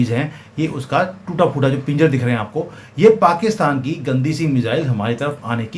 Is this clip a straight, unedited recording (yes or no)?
yes